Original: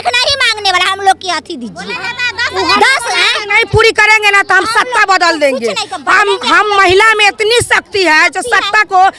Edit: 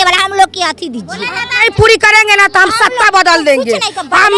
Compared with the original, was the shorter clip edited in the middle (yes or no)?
yes